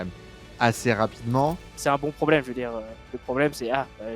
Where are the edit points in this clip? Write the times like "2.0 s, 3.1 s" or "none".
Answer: 1.7 s